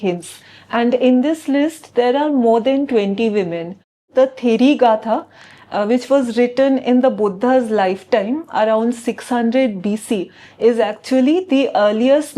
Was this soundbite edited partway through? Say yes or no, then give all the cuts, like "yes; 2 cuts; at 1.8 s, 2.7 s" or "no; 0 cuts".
yes; 1 cut; at 4.1 s